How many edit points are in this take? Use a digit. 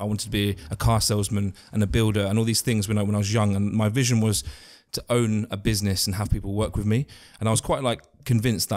0